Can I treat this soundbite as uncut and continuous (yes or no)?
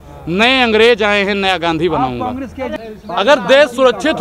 no